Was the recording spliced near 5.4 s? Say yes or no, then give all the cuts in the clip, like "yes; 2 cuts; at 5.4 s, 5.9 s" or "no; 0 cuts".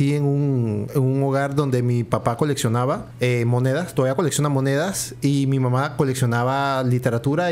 no; 1 cut; at 3.1 s